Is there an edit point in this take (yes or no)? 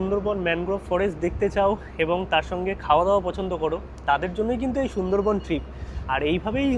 no